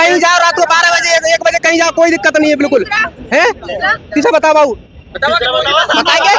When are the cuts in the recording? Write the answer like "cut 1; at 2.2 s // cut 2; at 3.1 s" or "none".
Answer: none